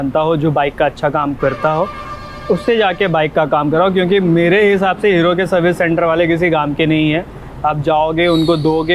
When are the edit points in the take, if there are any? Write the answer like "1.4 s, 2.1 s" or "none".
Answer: none